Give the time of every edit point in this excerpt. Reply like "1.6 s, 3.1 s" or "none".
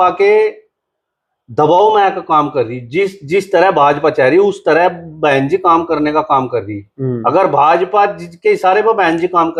none